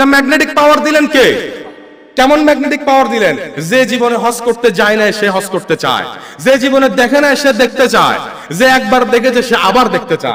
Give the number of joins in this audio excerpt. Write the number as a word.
zero